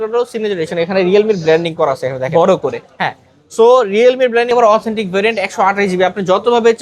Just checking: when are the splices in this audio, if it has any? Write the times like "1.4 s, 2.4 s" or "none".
4.5 s